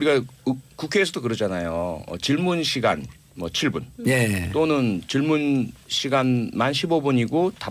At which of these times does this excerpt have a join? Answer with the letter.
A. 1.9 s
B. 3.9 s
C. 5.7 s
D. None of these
B